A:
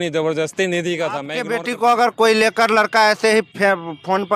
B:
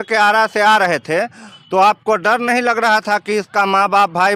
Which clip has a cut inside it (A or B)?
A